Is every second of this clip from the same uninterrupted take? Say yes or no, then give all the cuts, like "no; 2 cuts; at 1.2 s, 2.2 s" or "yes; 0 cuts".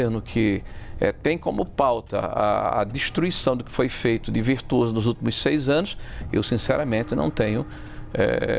yes; 0 cuts